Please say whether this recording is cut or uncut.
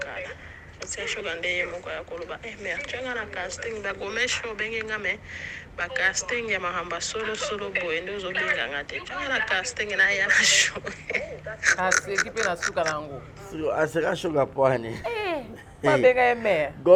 uncut